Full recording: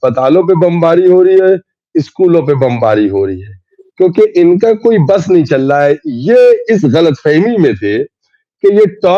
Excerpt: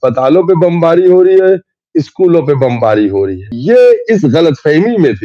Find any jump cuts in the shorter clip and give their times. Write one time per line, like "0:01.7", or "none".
0:03.5